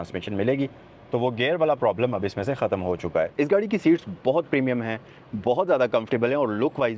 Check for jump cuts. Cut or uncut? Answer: cut